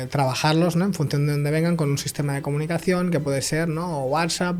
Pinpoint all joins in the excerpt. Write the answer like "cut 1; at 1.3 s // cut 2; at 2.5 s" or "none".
none